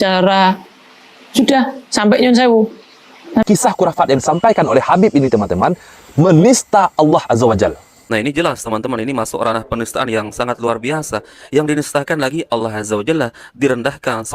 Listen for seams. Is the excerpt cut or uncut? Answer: cut